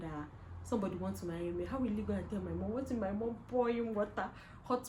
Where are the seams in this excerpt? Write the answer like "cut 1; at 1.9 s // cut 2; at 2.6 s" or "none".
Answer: none